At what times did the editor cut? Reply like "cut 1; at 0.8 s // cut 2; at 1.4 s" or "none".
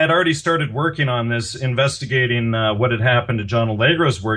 cut 1; at 3.2 s

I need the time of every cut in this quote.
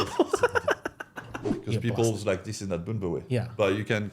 cut 1; at 1.5 s

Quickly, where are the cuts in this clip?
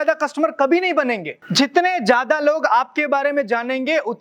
cut 1; at 1.4 s

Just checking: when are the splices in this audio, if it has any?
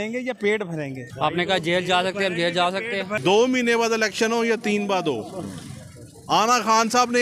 cut 1; at 1.0 s // cut 2; at 3.1 s

